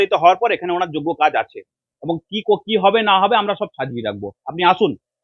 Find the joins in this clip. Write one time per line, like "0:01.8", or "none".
none